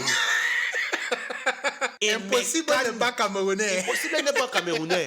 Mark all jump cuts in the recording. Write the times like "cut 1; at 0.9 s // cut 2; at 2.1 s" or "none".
cut 1; at 1.9 s